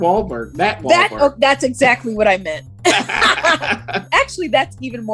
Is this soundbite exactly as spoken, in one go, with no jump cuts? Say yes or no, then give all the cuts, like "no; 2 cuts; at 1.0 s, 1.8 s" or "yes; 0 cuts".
no; 1 cut; at 4.1 s